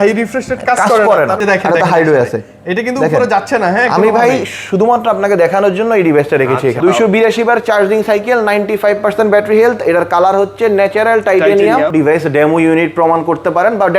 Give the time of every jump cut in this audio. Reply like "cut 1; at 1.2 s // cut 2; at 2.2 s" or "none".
cut 1; at 1.4 s // cut 2; at 6.8 s // cut 3; at 11.9 s